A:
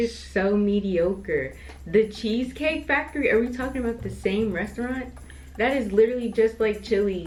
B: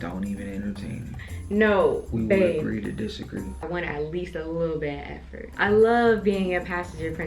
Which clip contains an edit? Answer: B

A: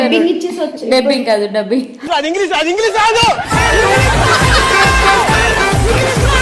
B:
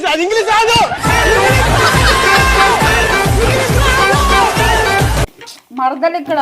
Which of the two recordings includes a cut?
B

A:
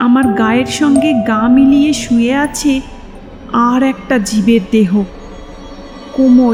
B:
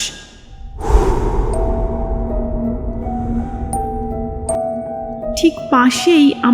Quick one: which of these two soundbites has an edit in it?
B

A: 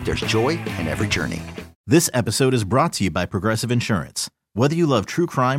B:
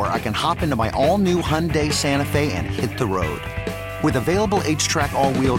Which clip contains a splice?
A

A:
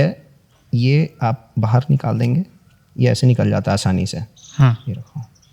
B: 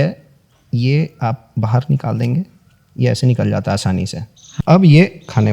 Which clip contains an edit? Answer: B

